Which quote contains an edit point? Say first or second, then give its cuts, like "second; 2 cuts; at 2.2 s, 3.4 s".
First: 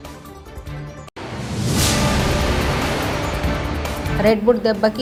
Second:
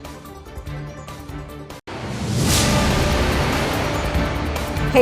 second; 1 cut; at 1.1 s